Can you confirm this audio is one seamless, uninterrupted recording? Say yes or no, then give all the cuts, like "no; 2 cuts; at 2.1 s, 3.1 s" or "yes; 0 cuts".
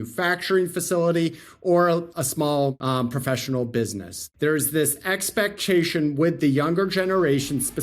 no; 2 cuts; at 2.4 s, 4.2 s